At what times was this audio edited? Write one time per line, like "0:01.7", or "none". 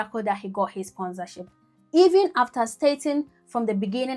none